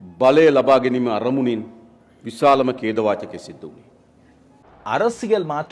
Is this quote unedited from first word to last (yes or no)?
no